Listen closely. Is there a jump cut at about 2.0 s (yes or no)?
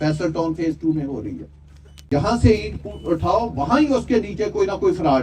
yes